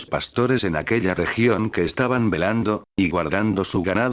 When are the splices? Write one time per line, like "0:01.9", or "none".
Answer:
0:02.9